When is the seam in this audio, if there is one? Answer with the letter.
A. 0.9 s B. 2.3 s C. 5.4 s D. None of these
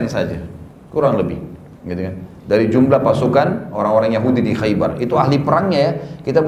D